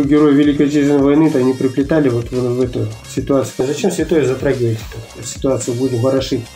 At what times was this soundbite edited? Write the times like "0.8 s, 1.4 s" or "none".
3.6 s, 5.3 s